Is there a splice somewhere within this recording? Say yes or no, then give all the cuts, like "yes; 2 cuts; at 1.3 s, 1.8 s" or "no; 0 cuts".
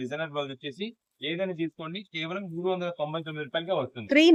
no; 0 cuts